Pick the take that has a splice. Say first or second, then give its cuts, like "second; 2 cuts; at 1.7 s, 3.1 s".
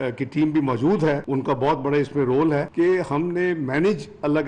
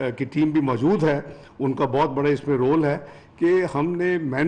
first; 2 cuts; at 1.2 s, 2.7 s